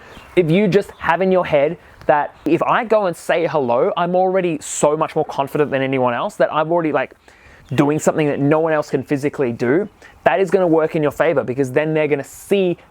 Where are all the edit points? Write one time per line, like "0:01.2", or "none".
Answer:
0:02.5